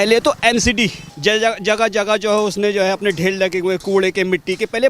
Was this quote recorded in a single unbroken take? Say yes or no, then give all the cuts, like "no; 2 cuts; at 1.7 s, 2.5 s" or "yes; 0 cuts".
no; 1 cut; at 1.1 s